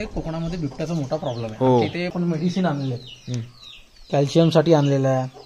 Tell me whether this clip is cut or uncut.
cut